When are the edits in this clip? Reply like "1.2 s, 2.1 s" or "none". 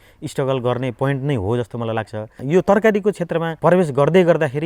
none